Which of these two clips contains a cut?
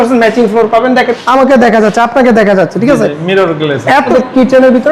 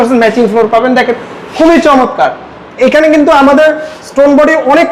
first; 2 cuts; at 1.2 s, 4.1 s

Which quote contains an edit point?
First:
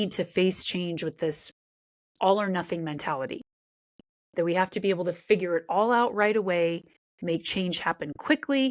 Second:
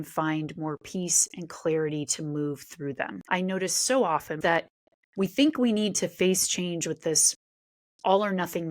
second; 2 cuts; at 3.2 s, 4.4 s

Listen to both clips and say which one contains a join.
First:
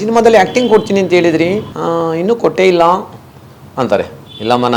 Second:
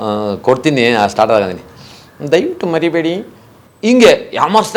first; 1 cut; at 1.7 s

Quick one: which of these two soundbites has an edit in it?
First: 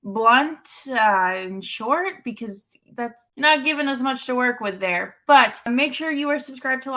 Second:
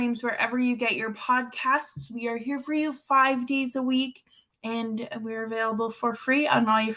first; 2 cuts; at 3.2 s, 5.7 s

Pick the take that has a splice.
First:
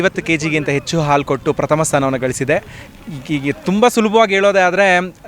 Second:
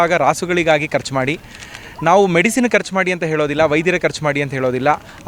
first; 1 cut; at 2.8 s

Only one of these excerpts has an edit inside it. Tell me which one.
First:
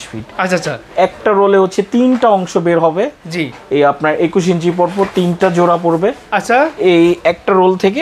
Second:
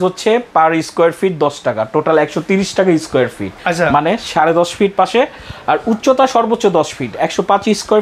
second; 1 cut; at 3.5 s

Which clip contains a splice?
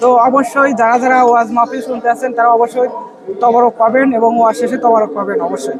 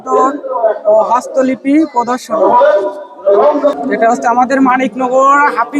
second; 1 cut; at 3.7 s

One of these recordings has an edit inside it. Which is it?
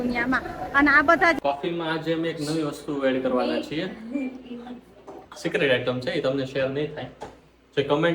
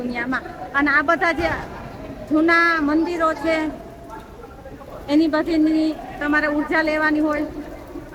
first; 1 cut; at 1.4 s

